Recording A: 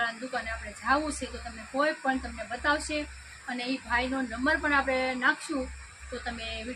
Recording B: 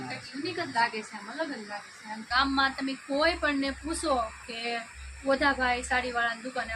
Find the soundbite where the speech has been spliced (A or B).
B